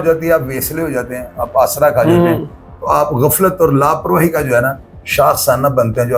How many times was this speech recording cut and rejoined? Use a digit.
0